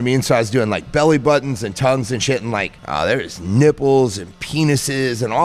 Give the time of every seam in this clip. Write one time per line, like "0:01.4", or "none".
0:02.8